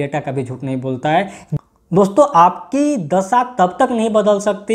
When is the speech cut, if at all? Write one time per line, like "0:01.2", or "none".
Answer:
0:01.4